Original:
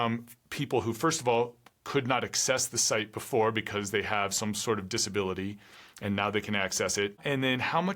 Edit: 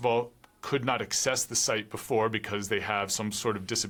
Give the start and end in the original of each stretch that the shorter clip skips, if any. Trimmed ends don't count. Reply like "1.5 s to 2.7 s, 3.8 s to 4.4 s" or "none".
none